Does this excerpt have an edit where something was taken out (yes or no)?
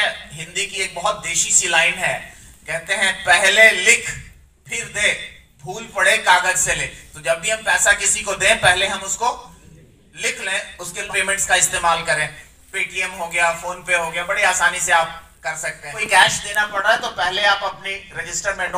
yes